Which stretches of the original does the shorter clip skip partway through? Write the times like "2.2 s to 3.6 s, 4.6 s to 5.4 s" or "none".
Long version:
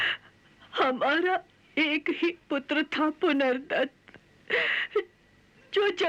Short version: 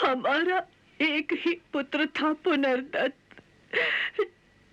none

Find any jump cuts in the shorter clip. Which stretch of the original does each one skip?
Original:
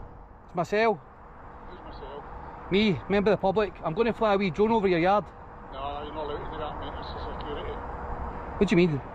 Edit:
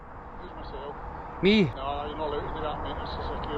3.0 s to 5.7 s

